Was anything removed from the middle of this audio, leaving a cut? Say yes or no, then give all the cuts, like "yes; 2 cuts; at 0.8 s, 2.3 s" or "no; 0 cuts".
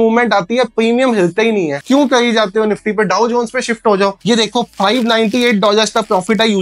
no; 0 cuts